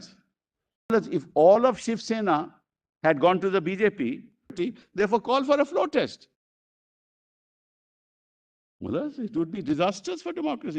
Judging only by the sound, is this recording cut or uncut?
cut